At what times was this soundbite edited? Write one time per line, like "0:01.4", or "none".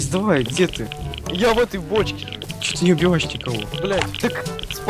0:02.8
0:04.2

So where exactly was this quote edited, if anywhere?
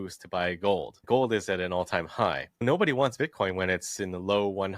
0:01.0
0:02.6

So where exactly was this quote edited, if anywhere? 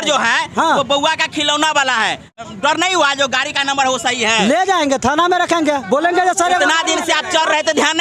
0:02.4

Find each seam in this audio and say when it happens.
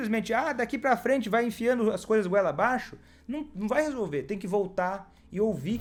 none

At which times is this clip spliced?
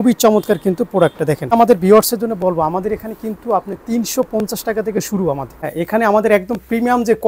0:01.5
0:05.6

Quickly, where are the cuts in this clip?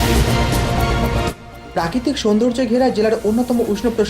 0:01.2

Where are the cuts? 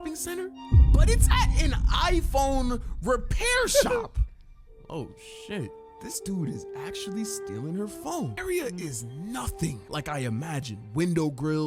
0:05.9
0:08.4

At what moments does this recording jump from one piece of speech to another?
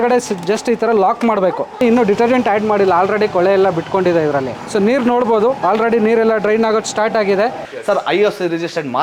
0:01.7
0:04.5
0:07.6

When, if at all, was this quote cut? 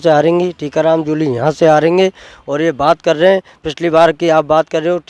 none

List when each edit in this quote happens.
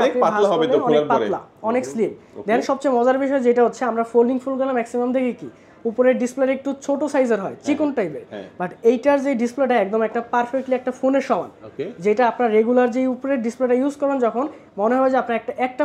none

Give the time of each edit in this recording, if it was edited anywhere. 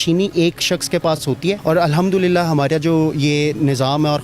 0:01.2

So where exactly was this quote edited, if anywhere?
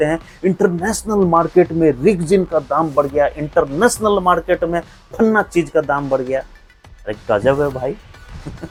none

